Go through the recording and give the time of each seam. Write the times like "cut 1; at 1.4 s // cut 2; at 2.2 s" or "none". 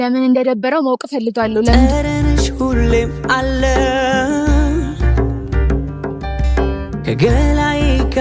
cut 1; at 1.9 s